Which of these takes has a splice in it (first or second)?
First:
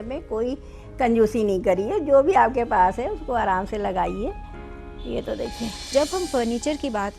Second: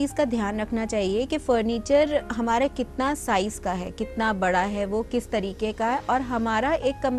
first